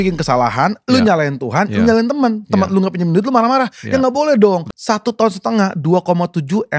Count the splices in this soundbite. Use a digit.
1